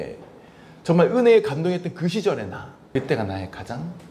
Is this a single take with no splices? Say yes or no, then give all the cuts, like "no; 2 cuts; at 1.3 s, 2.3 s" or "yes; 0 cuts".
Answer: no; 1 cut; at 2.8 s